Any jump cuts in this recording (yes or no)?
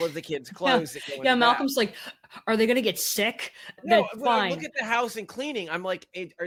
no